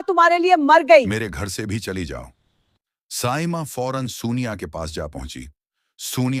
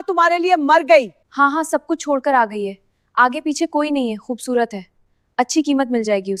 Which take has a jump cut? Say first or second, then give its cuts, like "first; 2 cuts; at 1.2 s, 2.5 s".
second; 1 cut; at 1.2 s